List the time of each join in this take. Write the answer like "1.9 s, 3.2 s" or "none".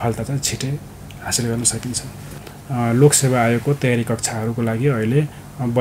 2.2 s